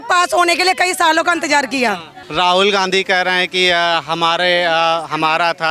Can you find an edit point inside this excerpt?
yes; 1 cut; at 2.2 s

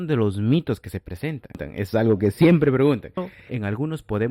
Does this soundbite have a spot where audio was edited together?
yes; 2 cuts; at 1.7 s, 3.3 s

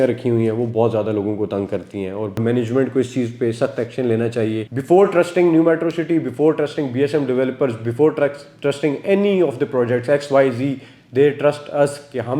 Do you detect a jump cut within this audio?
yes; 2 cuts; at 2.4 s, 4.7 s

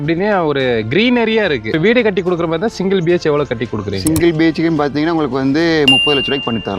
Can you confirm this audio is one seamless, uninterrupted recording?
no; 1 cut; at 1.7 s

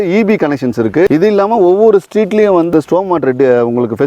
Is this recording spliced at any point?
yes; 2 cuts; at 1.1 s, 2.7 s

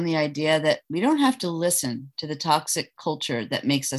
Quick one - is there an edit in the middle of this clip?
no; 0 cuts

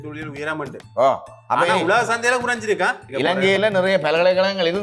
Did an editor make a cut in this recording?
yes; 1 cut; at 3.0 s

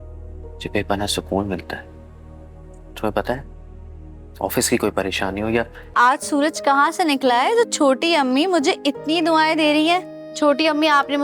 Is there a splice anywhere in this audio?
yes; 1 cut; at 5.8 s

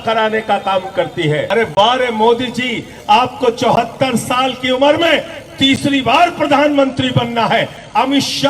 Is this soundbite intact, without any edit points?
no; 1 cut; at 1.5 s

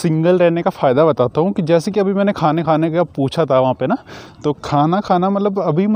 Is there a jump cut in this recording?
no; 0 cuts

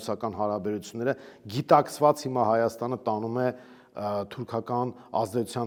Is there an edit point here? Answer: no; 0 cuts

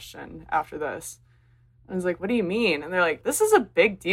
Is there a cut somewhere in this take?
yes; 1 cut; at 3.2 s

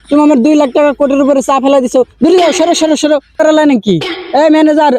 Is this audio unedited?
no; 1 cut; at 3.4 s

